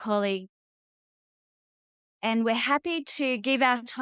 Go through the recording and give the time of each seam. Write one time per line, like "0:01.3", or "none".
none